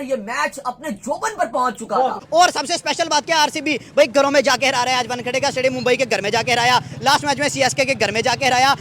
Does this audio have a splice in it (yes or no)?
yes